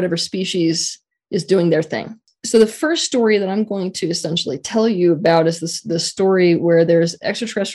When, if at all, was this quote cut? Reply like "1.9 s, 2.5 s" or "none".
2.3 s